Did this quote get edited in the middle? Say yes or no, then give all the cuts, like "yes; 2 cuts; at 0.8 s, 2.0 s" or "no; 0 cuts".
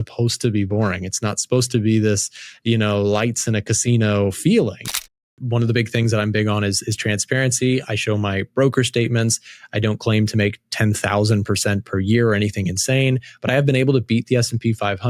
yes; 1 cut; at 5.0 s